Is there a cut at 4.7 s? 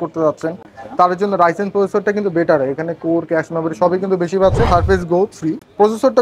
yes; 1 cut; at 4.7 s

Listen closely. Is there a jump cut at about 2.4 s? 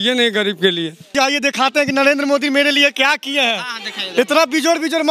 no; 1 cut; at 1.0 s

